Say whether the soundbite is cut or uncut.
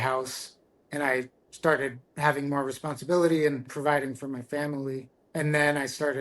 cut